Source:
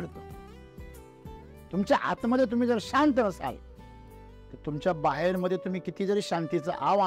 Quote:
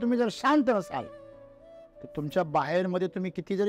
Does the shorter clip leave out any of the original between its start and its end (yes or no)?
no